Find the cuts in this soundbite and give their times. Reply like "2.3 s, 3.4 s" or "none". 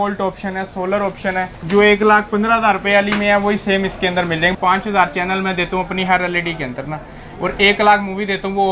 1.6 s, 4.5 s